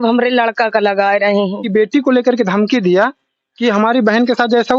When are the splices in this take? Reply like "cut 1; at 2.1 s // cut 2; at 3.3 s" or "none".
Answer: cut 1; at 1.7 s

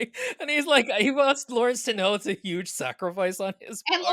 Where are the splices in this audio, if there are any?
none

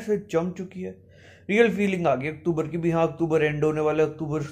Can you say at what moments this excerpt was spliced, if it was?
none

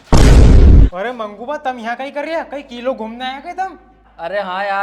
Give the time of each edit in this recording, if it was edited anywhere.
cut 1; at 0.9 s

